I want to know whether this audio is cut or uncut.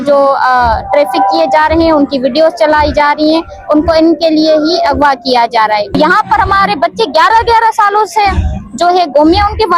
cut